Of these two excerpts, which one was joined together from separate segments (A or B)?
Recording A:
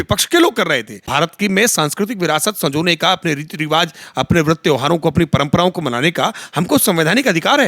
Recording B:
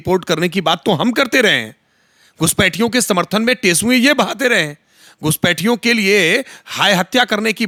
A